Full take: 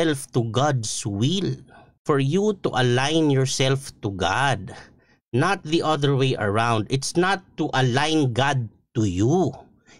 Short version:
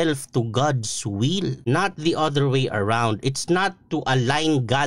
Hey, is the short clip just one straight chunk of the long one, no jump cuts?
no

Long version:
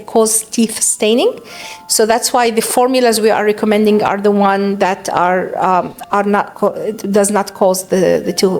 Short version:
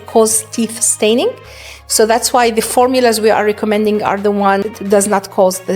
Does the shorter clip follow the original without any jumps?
no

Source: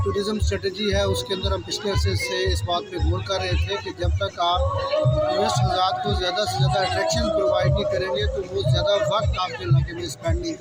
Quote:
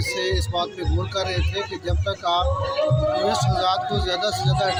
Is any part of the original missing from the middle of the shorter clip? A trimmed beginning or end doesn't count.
no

